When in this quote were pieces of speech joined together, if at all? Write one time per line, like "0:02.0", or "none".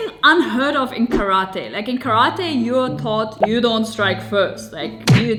none